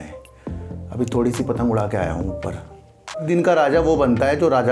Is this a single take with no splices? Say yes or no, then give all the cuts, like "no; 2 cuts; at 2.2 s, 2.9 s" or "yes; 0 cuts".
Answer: no; 1 cut; at 3.3 s